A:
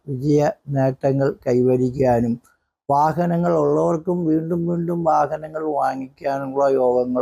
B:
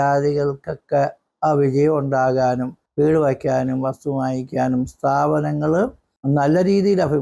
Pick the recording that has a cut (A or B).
B